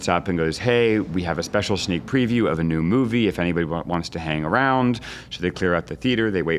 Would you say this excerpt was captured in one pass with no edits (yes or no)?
yes